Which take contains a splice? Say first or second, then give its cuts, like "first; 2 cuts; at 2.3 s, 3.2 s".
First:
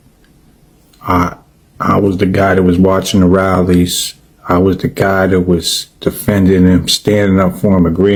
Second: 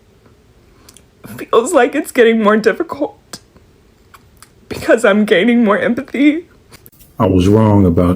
second; 1 cut; at 6.7 s